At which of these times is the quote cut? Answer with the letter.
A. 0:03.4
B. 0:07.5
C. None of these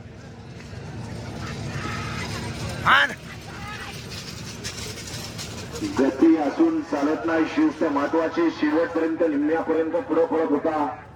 C